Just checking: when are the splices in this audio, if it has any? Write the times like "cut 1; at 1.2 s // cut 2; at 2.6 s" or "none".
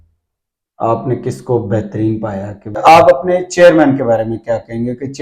cut 1; at 2.8 s